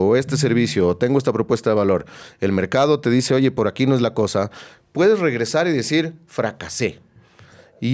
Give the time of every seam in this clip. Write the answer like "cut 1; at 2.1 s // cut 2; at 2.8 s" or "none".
none